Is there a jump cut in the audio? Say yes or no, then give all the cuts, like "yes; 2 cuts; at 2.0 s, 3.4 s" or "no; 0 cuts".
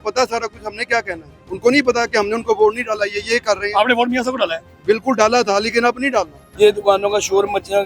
yes; 1 cut; at 6.4 s